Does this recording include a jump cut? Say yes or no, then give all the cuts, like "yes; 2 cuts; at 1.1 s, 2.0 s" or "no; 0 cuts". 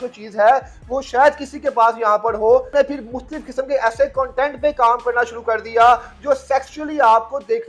yes; 1 cut; at 2.7 s